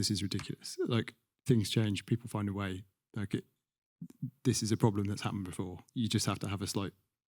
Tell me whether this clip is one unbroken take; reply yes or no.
no